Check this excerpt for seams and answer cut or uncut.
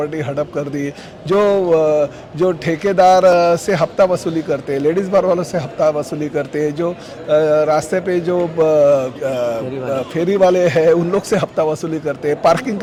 uncut